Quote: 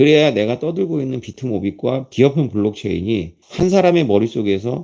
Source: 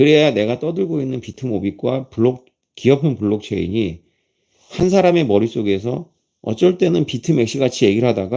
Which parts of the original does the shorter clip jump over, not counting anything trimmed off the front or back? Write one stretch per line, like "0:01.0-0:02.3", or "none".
0:02.1-0:02.7
0:04.1-0:04.6